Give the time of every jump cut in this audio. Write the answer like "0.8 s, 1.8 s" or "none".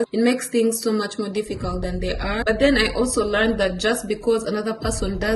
2.4 s